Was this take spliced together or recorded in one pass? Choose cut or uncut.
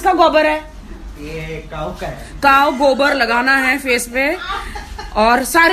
uncut